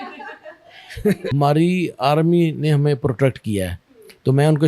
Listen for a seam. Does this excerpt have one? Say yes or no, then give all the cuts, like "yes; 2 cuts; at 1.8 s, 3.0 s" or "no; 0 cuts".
yes; 1 cut; at 1.3 s